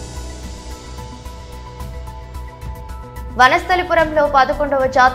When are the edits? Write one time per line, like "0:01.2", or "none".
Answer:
0:01.4
0:02.8